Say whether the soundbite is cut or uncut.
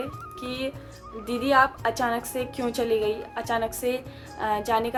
uncut